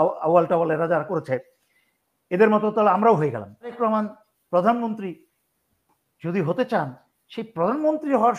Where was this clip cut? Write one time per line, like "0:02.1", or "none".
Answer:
0:03.7